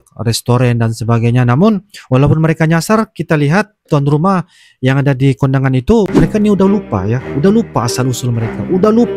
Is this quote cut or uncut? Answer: cut